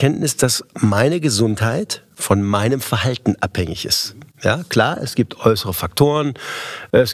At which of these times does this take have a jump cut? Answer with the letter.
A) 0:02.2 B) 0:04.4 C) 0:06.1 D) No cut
D